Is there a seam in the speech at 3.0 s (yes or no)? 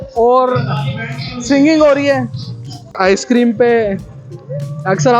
yes